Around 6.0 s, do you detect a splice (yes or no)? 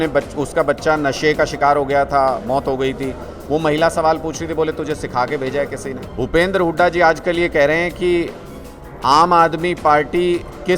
yes